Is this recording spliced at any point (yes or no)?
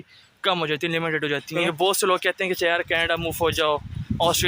yes